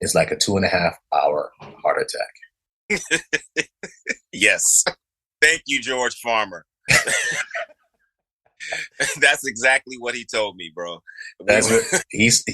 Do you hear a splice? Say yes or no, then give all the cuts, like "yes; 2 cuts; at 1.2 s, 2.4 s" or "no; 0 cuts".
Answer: yes; 1 cut; at 5.1 s